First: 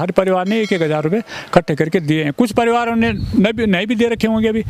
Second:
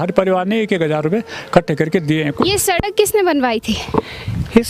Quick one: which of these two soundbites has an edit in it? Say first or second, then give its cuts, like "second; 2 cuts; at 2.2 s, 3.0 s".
second; 1 cut; at 2.4 s